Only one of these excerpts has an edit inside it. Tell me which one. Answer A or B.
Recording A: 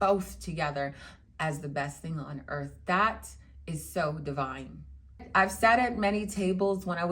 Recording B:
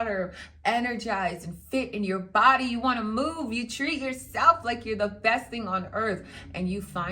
A